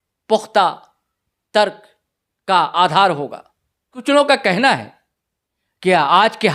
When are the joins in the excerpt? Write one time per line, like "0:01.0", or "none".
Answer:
0:03.9